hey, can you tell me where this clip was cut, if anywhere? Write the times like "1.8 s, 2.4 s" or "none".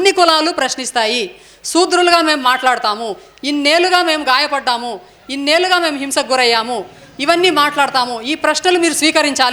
none